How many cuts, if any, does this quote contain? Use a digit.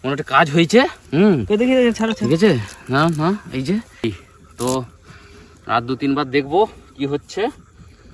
1